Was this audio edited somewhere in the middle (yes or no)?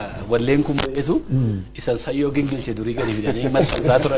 no